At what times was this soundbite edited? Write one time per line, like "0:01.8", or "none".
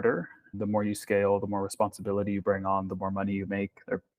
none